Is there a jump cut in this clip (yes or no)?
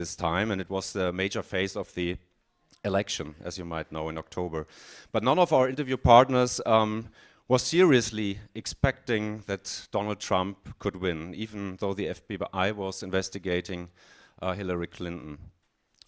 yes